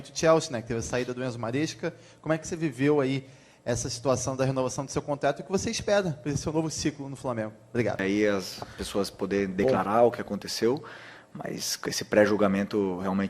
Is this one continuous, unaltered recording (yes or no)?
no